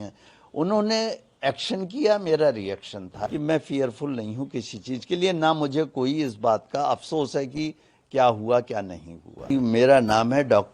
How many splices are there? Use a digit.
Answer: 2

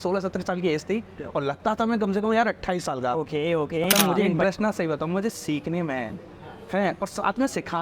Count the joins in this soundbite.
1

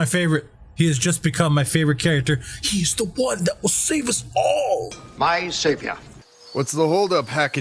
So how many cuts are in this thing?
1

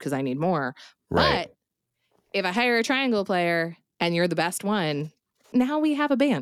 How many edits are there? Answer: 1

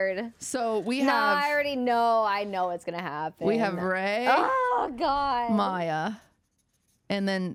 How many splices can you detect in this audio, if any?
0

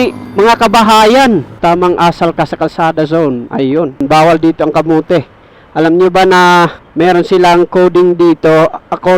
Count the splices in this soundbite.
3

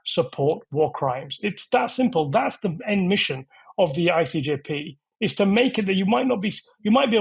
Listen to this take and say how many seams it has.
0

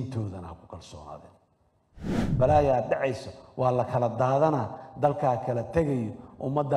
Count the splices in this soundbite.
1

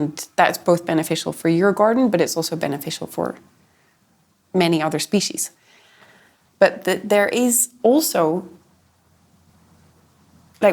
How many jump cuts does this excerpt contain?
1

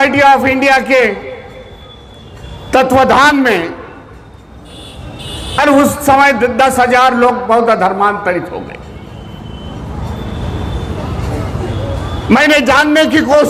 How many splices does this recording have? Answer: 0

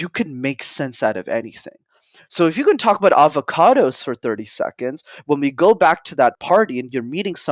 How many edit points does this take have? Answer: 1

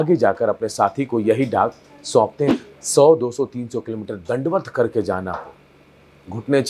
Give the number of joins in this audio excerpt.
1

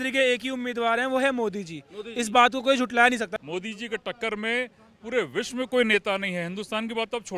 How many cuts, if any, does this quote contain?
1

